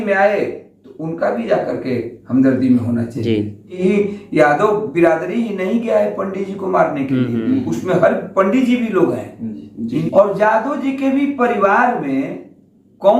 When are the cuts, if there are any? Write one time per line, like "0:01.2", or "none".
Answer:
0:03.7
0:10.0